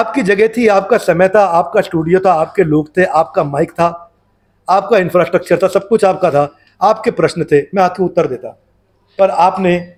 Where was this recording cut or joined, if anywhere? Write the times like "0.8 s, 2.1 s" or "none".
none